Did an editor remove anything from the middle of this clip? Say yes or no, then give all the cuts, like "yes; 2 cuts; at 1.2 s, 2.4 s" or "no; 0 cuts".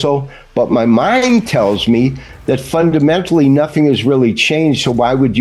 no; 0 cuts